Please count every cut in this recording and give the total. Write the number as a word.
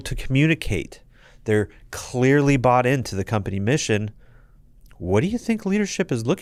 zero